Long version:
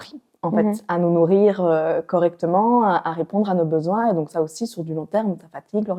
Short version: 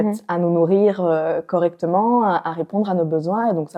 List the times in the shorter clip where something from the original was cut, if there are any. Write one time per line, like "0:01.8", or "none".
none